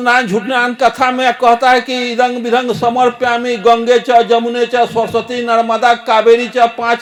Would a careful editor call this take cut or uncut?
uncut